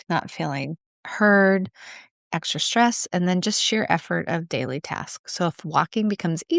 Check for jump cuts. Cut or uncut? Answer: uncut